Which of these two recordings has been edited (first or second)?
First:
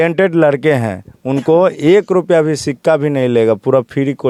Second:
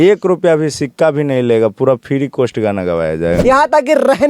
second